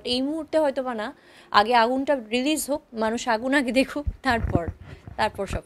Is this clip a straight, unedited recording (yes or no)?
yes